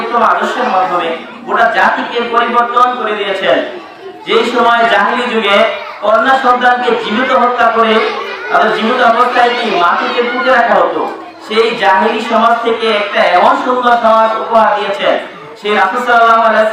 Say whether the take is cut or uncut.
uncut